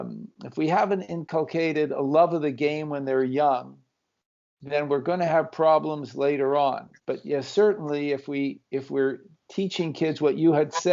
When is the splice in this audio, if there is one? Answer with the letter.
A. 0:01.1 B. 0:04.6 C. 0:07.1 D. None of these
A